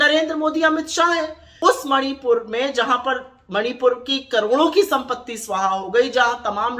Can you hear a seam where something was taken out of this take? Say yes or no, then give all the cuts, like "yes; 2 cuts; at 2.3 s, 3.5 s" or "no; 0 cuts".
yes; 1 cut; at 1.4 s